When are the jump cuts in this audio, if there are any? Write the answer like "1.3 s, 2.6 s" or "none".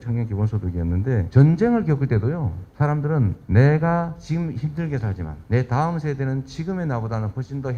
1.2 s, 3.1 s, 4.2 s, 5.3 s